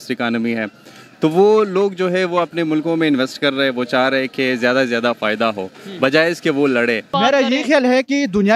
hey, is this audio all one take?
no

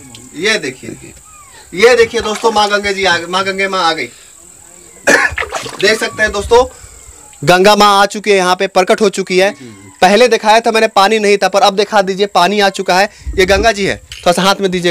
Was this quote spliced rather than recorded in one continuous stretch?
no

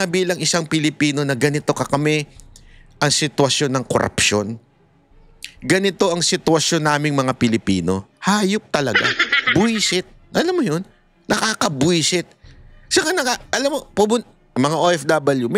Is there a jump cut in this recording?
no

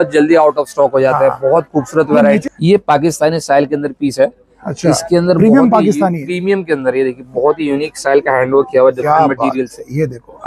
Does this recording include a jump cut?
yes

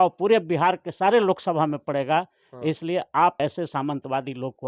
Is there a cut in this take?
yes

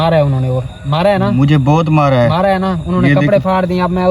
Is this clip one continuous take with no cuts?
yes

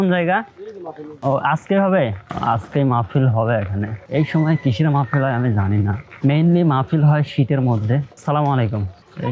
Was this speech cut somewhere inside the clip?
no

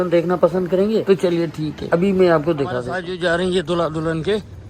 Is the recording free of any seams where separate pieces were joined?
no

